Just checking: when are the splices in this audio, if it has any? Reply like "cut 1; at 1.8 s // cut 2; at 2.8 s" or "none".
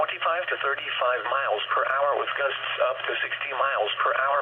cut 1; at 3.5 s